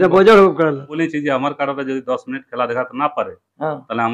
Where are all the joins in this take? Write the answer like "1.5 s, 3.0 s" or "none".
1.0 s